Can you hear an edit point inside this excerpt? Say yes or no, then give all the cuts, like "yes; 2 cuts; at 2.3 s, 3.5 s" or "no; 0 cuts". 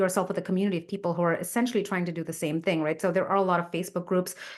no; 0 cuts